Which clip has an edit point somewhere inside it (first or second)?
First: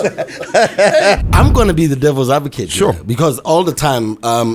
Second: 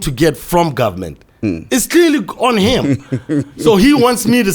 first